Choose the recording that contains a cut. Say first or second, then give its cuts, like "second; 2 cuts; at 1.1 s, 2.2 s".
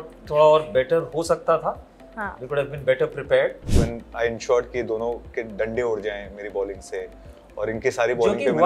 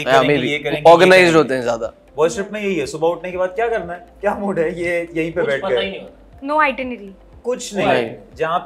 first; 1 cut; at 3.7 s